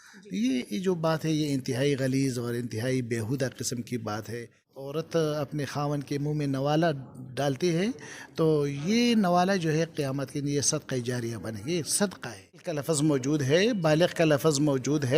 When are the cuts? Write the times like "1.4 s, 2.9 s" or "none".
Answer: 4.7 s, 12.8 s